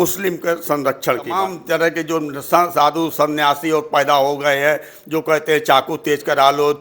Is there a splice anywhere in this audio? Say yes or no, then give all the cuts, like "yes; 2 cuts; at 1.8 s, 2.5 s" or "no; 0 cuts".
yes; 1 cut; at 1.5 s